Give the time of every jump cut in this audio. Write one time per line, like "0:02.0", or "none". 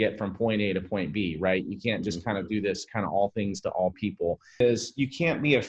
0:04.6